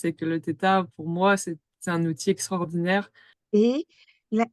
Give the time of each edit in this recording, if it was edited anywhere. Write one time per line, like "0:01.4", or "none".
0:03.4